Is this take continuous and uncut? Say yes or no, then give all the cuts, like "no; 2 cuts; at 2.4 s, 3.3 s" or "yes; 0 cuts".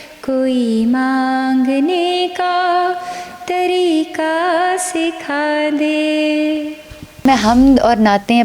no; 1 cut; at 7.2 s